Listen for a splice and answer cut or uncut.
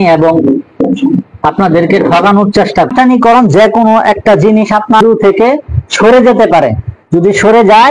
cut